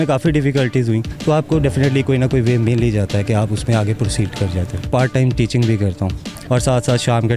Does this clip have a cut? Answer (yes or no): yes